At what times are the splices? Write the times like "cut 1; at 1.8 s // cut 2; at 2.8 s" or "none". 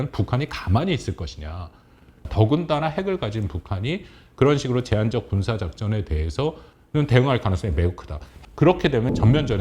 cut 1; at 2.1 s // cut 2; at 8.4 s